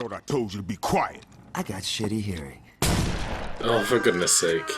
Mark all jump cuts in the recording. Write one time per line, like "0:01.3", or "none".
none